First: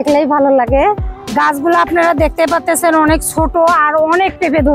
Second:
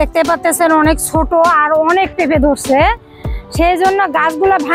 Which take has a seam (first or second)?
first